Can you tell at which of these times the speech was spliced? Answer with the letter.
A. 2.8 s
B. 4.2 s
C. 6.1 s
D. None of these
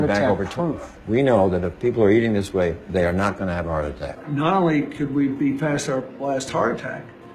B